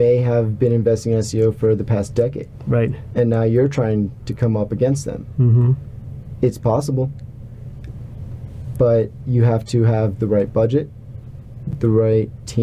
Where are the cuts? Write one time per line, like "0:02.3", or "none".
none